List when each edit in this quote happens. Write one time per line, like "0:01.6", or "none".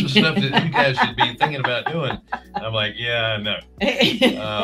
none